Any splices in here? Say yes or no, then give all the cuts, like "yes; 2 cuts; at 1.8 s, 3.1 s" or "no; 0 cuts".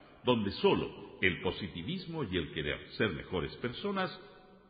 no; 0 cuts